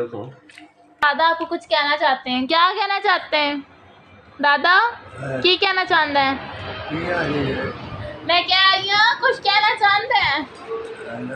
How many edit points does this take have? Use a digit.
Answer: 2